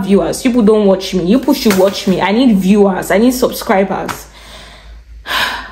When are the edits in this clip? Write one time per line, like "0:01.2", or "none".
none